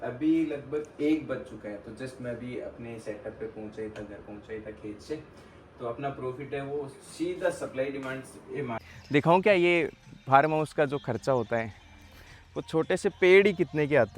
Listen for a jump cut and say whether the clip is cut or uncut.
cut